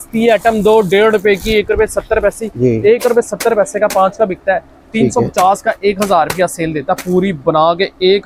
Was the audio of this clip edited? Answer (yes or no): no